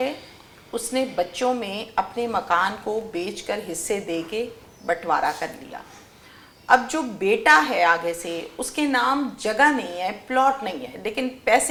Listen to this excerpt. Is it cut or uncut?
uncut